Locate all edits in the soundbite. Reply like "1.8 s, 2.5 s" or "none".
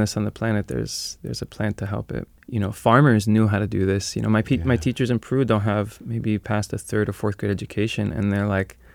2.3 s